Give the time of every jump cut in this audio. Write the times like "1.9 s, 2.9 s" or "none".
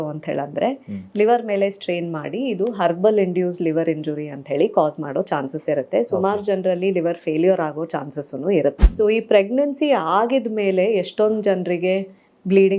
8.8 s